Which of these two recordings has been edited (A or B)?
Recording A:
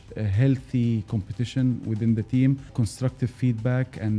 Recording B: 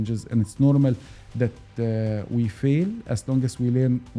A